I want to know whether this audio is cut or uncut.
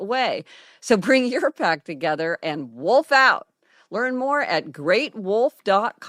uncut